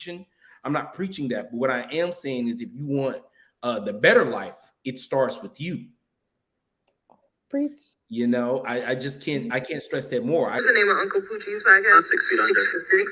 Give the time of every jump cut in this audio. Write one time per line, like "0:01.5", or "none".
0:10.5